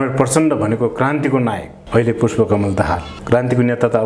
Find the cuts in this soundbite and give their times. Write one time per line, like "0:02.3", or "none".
0:03.1